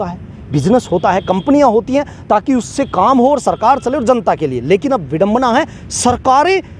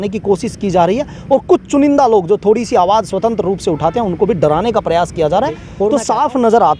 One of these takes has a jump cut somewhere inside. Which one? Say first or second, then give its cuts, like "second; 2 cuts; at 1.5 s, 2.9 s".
second; 1 cut; at 5.9 s